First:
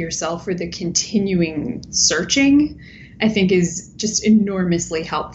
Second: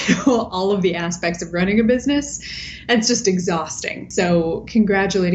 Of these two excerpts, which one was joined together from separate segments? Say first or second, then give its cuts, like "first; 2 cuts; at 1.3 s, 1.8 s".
second; 1 cut; at 4.1 s